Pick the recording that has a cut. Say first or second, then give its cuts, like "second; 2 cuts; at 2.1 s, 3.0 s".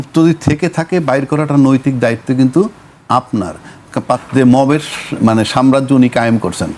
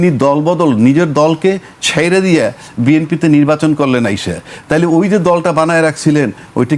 first; 1 cut; at 4.2 s